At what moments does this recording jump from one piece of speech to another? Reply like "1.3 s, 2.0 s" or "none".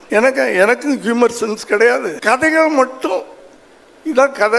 2.1 s